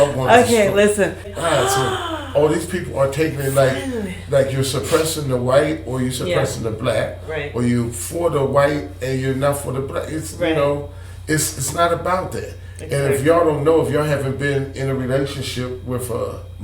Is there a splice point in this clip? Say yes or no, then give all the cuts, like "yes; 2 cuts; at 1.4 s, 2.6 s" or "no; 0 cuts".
yes; 1 cut; at 1.3 s